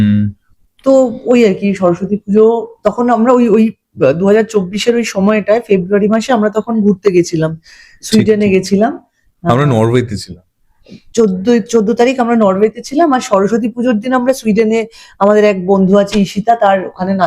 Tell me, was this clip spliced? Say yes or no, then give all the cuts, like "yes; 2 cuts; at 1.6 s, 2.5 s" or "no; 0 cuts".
no; 0 cuts